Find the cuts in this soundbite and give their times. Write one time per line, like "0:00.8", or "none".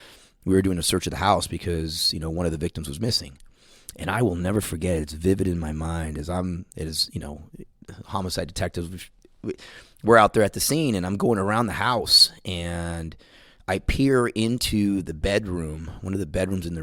none